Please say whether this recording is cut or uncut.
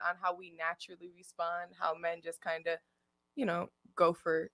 uncut